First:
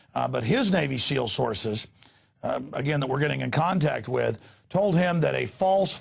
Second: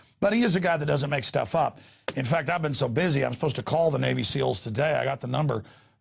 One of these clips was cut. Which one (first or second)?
second